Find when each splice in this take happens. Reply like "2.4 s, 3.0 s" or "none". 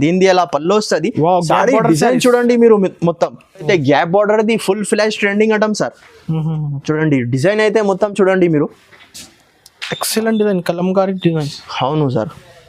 3.6 s